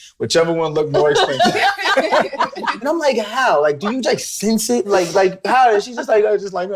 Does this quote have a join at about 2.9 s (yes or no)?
yes